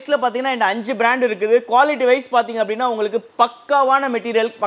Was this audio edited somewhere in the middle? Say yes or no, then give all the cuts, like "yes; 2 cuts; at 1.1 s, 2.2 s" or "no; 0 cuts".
no; 0 cuts